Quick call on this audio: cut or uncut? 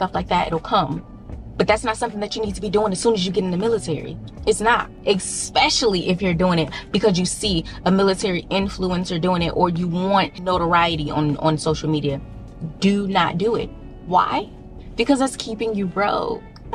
uncut